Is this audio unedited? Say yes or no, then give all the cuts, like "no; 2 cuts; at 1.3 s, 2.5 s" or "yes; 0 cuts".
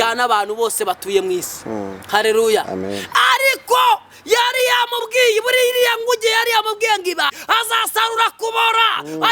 no; 1 cut; at 7.4 s